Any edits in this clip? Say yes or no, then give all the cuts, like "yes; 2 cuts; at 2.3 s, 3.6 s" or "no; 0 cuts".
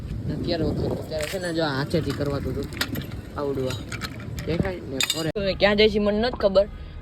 yes; 1 cut; at 5.4 s